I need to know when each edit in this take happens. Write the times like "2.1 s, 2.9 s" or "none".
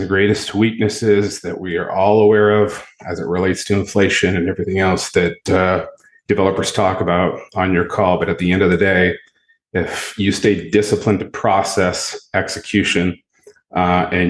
none